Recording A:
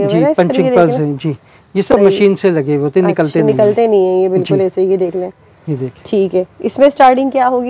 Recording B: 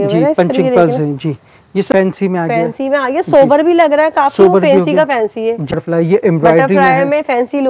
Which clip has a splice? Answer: B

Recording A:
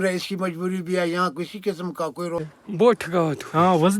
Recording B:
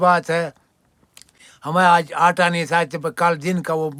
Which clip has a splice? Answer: A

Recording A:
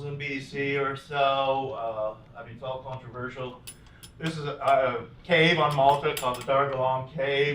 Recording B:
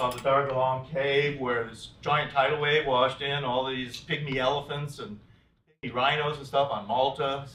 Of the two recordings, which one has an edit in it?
A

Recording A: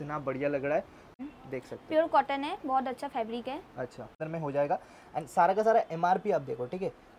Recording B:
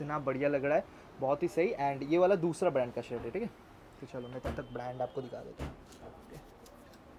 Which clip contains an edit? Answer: A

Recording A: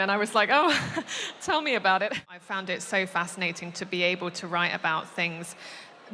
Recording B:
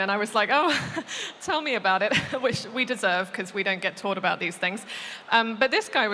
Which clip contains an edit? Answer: A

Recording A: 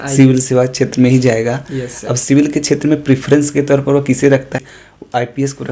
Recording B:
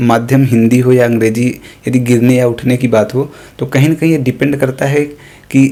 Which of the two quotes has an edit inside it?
A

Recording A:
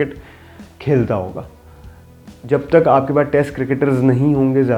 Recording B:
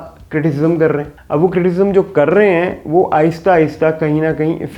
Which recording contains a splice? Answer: B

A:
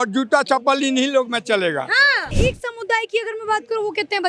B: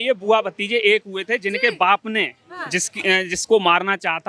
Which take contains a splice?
A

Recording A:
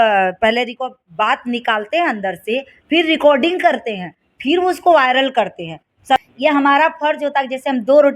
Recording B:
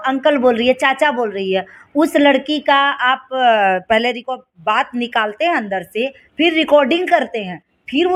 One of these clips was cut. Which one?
A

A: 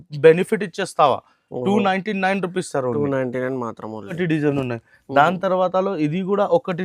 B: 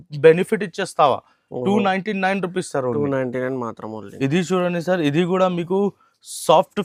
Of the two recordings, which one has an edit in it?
A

